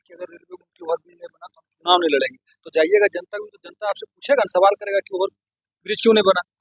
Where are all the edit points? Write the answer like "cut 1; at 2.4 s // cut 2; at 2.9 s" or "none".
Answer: none